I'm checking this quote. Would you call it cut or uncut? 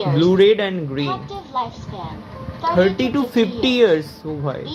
uncut